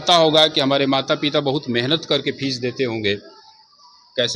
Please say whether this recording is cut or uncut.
uncut